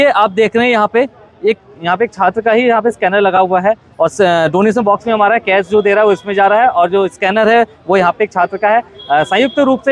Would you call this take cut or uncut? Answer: uncut